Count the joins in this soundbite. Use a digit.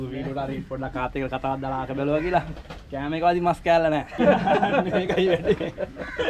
1